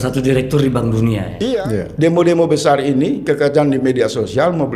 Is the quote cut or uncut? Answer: cut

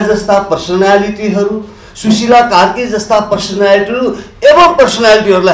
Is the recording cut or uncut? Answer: uncut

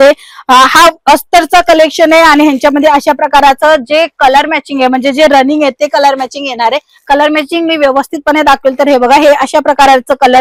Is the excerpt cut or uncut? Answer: uncut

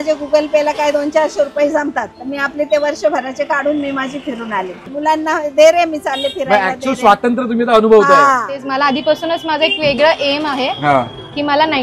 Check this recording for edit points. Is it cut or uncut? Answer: cut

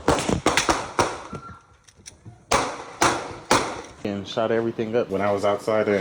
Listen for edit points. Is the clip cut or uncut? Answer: uncut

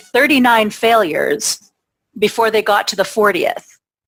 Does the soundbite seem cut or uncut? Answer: uncut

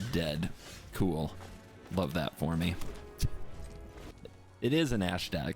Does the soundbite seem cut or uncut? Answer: cut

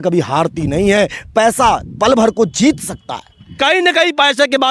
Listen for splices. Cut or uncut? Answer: cut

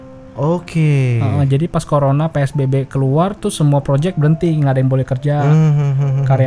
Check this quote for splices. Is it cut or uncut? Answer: uncut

